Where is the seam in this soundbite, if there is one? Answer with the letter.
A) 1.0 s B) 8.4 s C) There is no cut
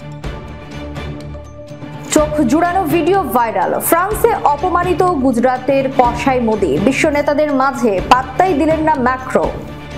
A